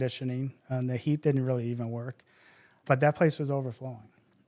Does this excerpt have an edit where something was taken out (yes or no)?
yes